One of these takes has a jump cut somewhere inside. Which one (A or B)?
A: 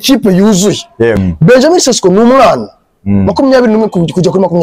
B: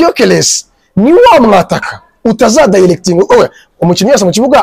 A